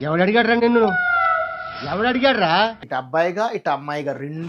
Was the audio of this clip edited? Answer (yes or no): yes